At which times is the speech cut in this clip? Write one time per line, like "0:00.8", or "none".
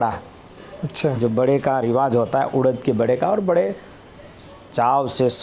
none